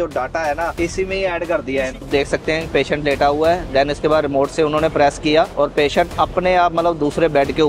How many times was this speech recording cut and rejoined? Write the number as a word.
three